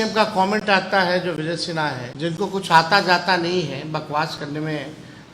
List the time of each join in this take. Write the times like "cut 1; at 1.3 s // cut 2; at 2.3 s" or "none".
cut 1; at 2.1 s